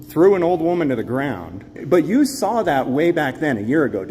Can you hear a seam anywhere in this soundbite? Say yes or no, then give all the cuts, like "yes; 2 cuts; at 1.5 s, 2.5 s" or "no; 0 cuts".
yes; 1 cut; at 1.8 s